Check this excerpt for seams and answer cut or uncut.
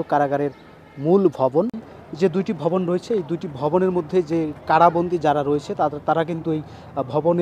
cut